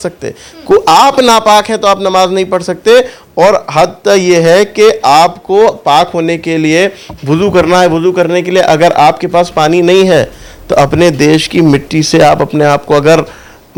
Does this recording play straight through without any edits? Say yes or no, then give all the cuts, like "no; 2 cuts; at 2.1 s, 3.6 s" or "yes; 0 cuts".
yes; 0 cuts